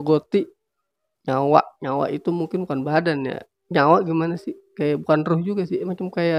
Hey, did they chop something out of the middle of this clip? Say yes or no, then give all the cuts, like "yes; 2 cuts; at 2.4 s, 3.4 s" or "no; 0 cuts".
no; 0 cuts